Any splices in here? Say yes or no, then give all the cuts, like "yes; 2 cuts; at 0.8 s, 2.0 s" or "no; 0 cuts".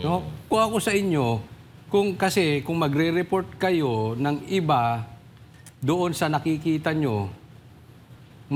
no; 0 cuts